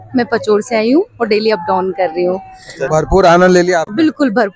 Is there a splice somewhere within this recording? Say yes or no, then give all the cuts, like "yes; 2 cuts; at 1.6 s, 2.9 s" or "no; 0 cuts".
yes; 1 cut; at 2.9 s